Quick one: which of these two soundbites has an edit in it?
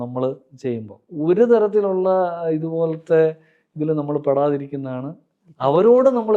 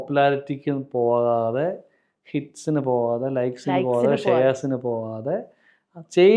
first; 1 cut; at 1.0 s

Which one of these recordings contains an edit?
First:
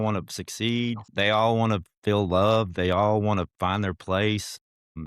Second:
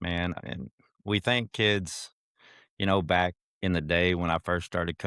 first; 2 cuts; at 1.1 s, 1.9 s

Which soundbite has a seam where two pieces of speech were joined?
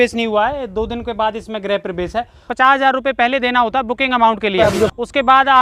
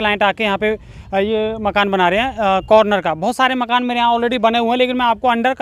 first; 1 cut; at 2.4 s

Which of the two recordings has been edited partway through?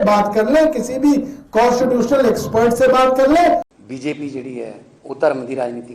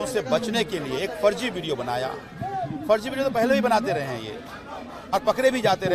first; 2 cuts; at 3.7 s, 4.9 s

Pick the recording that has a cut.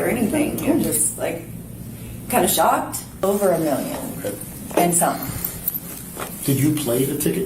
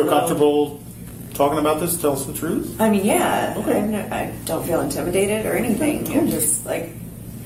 first; 1 cut; at 3.2 s

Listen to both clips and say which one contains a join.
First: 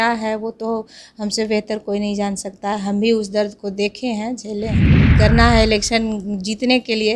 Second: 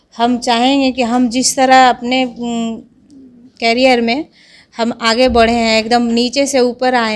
first; 1 cut; at 4.8 s

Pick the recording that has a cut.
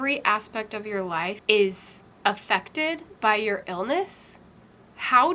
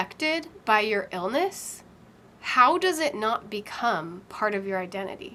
first; 1 cut; at 1.4 s

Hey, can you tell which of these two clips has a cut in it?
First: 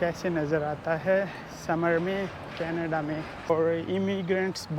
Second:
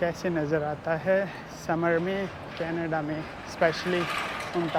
first; 1 cut; at 3.5 s

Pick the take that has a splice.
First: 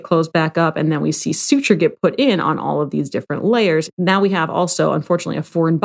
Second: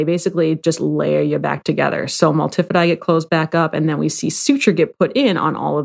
first; 1 cut; at 3.9 s

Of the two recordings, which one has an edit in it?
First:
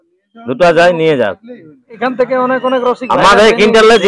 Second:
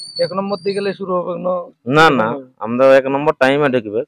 first; 1 cut; at 1.9 s

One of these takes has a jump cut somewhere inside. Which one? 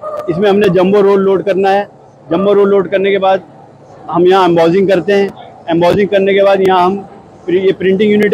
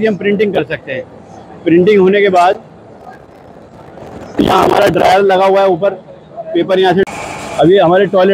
second; 1 cut; at 7.0 s

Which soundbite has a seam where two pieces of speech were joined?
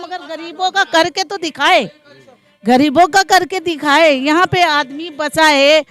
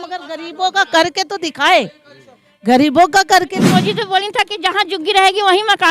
second; 1 cut; at 3.7 s

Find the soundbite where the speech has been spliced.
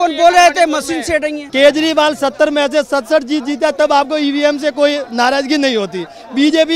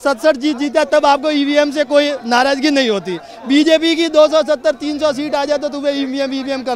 first; 1 cut; at 1.4 s

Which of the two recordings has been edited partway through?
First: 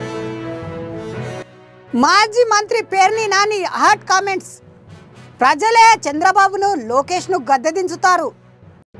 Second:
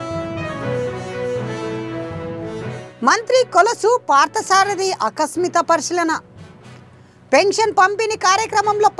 second; 1 cut; at 2.5 s

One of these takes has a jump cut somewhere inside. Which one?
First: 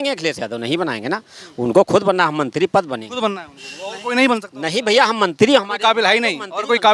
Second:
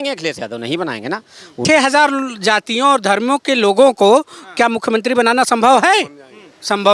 second; 1 cut; at 1.6 s

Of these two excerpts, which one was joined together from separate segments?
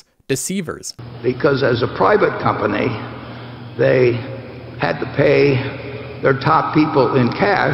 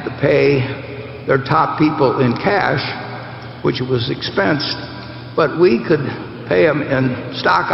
first; 1 cut; at 0.9 s

